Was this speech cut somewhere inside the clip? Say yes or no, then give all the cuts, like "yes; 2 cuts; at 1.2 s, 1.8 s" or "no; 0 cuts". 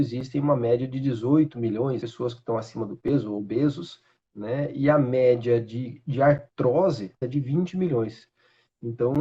yes; 2 cuts; at 2.0 s, 7.2 s